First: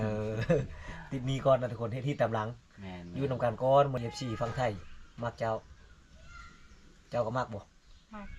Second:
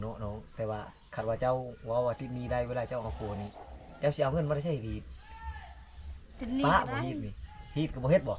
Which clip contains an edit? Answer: first; 1 cut; at 4.0 s

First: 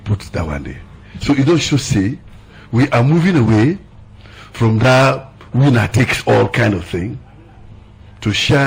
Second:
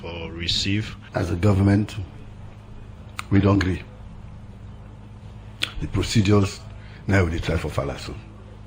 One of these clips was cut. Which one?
second; 1 cut; at 1.0 s

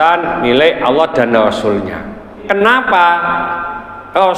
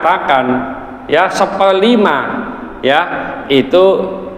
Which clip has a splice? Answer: first; 1 cut; at 2.3 s

